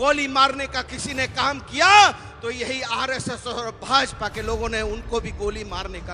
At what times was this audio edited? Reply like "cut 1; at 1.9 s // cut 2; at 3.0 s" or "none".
none